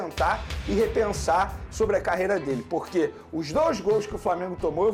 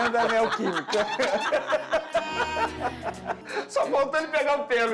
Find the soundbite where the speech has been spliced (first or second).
second